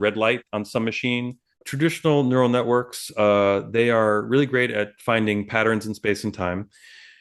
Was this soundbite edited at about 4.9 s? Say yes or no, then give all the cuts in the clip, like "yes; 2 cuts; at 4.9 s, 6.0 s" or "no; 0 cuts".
no; 1 cut; at 1.6 s